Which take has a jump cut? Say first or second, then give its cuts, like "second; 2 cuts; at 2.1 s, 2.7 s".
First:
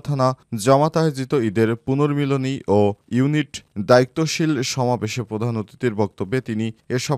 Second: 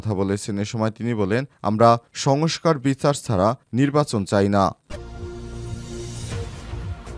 second; 1 cut; at 4.8 s